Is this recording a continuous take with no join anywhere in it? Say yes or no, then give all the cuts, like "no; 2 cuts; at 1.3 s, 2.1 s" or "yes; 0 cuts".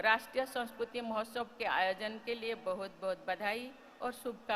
yes; 0 cuts